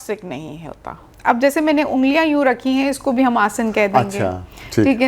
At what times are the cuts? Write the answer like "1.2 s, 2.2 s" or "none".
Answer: 1.1 s